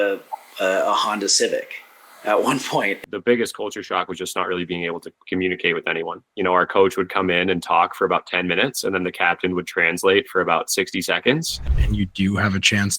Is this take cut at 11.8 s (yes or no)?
yes